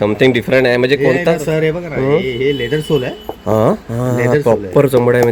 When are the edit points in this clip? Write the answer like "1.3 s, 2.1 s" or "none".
none